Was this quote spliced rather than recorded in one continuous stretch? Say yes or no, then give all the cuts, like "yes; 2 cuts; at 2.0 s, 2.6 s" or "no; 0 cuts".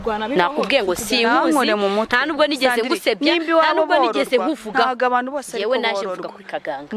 no; 0 cuts